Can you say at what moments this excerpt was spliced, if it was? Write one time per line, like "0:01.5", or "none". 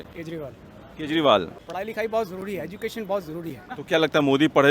0:01.6
0:03.6